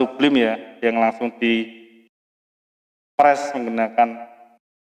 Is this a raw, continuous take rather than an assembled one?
yes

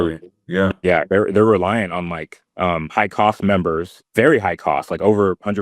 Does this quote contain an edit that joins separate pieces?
yes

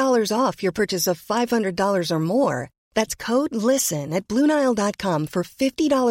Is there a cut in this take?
no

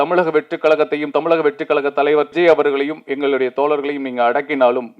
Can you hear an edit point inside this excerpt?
yes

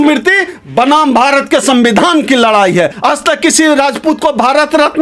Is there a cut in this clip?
yes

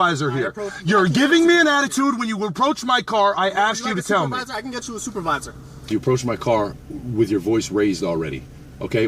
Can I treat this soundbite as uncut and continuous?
no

